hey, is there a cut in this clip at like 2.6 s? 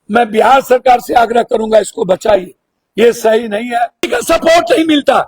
no; 1 cut; at 4.1 s

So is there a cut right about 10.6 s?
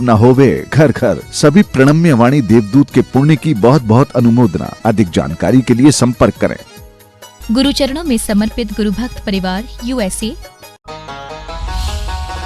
yes; 1 cut; at 10.6 s

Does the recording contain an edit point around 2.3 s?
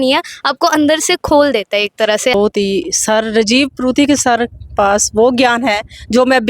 yes; 1 cut; at 2.3 s

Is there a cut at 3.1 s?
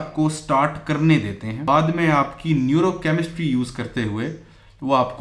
no; 1 cut; at 1.6 s

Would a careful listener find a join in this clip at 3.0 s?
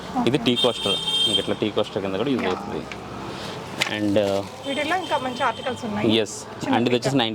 no; 0 cuts

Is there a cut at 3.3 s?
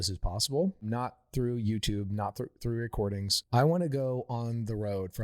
yes; 2 cuts; at 0.9 s, 3.3 s

